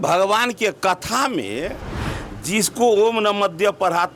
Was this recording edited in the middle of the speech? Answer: no; 0 cuts

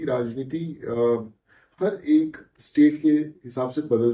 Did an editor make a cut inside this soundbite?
no; 0 cuts

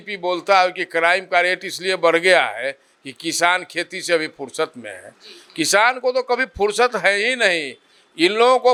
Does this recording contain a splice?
no; 0 cuts

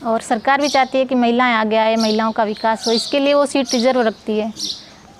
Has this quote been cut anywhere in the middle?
no; 0 cuts

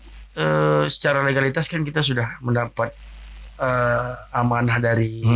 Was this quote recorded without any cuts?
yes; 0 cuts

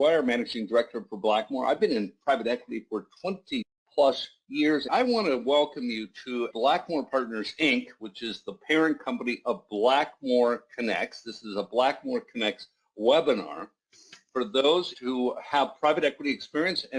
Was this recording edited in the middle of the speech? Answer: yes; 2 cuts; at 3.8 s, 4.9 s

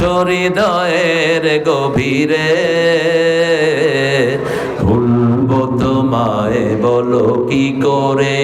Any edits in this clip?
no; 0 cuts

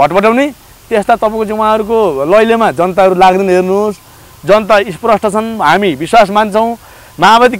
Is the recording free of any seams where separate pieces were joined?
yes; 0 cuts

